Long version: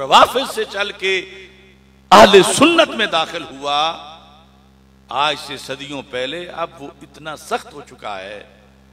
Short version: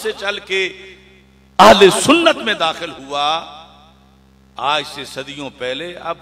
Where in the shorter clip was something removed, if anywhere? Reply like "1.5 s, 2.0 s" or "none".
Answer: none